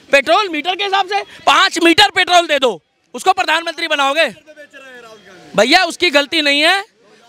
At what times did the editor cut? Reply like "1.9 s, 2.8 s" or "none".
none